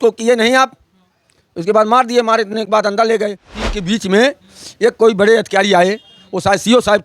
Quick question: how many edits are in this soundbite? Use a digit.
1